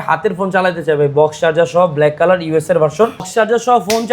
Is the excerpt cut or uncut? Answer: cut